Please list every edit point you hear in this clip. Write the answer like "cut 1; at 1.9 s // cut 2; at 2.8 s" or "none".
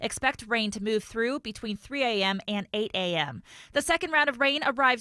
cut 1; at 3.6 s